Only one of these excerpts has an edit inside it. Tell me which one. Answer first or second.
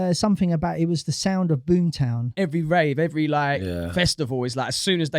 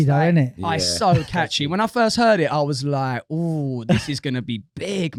first